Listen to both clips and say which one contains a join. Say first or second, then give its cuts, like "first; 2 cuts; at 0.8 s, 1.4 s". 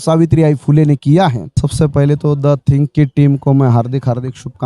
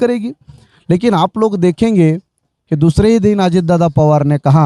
first; 1 cut; at 1.6 s